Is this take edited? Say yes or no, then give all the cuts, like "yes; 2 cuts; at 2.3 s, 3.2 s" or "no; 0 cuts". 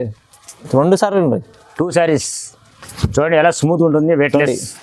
no; 0 cuts